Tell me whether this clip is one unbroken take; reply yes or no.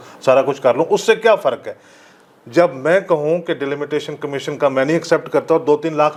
yes